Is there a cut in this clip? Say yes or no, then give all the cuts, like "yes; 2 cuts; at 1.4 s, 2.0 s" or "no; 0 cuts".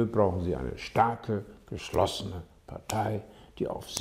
no; 0 cuts